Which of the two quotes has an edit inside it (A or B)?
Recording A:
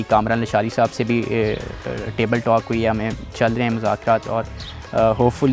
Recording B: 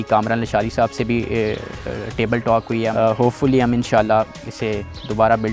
B